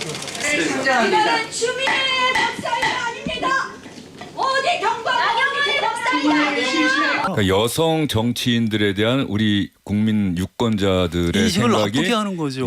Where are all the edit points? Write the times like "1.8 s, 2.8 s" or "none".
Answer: 7.3 s